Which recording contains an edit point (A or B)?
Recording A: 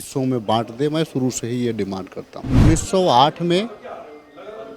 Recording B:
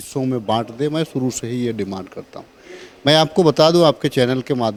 A